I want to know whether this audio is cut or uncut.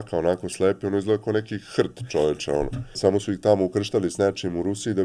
cut